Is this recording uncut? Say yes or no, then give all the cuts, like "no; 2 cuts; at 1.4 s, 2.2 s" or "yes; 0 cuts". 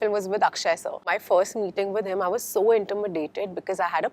no; 1 cut; at 1.1 s